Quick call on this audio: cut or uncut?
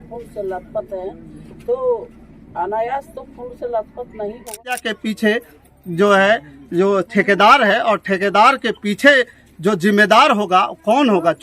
cut